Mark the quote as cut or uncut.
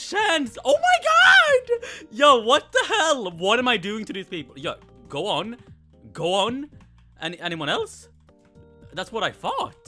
uncut